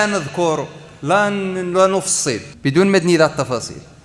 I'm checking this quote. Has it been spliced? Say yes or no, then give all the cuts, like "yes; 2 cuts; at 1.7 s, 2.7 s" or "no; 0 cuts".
yes; 1 cut; at 2.5 s